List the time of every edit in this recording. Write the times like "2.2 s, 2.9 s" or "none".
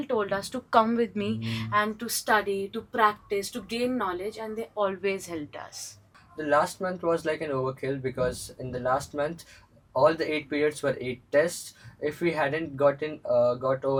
none